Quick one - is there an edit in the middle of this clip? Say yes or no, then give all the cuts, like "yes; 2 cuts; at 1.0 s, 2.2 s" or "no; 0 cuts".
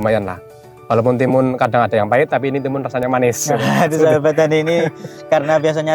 no; 0 cuts